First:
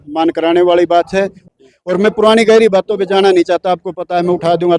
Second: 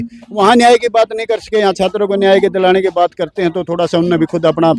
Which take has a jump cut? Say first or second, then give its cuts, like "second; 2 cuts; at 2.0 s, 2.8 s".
first; 1 cut; at 1.4 s